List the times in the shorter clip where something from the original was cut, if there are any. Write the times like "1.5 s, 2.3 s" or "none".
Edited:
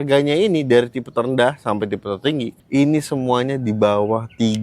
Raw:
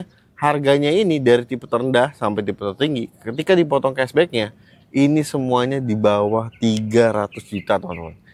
2.5 s